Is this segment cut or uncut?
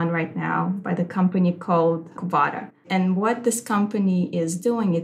cut